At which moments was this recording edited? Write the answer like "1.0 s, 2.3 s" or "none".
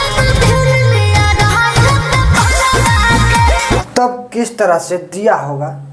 none